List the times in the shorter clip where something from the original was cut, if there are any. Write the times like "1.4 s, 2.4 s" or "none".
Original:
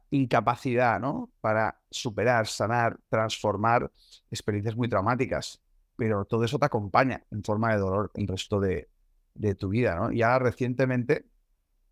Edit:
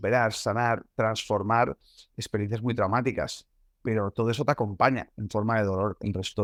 none